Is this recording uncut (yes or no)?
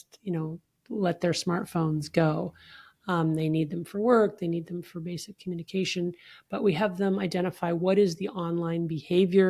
yes